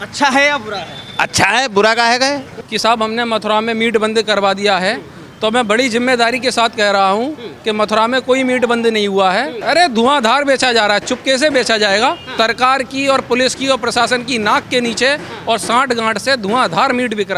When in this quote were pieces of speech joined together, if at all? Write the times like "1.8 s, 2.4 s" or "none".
2.5 s, 9.5 s, 12.3 s